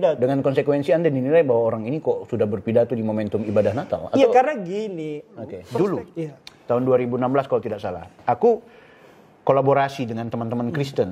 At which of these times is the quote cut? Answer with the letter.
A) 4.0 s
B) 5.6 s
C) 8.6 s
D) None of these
B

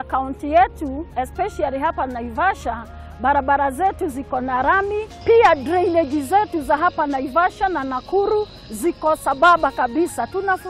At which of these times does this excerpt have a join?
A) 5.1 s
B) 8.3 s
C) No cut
A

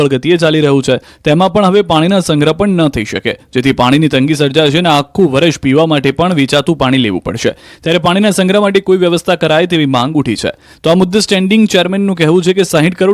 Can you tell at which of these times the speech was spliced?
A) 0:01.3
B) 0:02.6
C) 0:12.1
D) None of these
C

